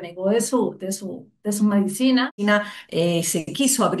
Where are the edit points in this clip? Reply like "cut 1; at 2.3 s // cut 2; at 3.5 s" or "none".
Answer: cut 1; at 2.4 s